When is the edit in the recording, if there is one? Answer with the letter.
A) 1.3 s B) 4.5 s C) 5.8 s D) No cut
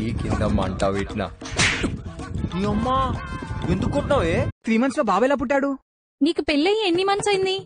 B